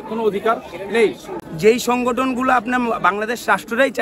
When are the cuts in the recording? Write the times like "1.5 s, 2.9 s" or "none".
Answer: 1.3 s